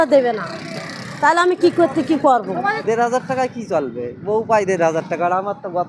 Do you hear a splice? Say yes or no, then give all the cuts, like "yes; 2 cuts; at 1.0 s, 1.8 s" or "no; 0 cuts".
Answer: yes; 1 cut; at 2.8 s